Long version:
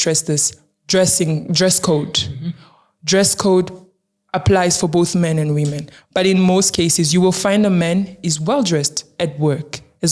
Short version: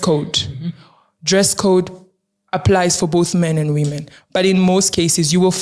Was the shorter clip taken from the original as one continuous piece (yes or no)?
yes